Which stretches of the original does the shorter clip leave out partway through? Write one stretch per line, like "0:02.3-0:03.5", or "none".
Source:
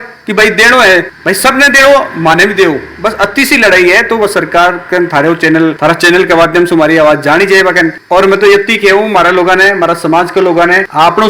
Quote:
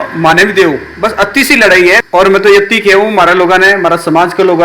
0:04.0-0:08.0